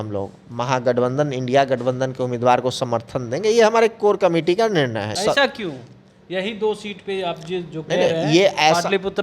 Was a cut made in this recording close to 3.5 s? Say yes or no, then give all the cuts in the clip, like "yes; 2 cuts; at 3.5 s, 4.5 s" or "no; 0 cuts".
no; 1 cut; at 5.2 s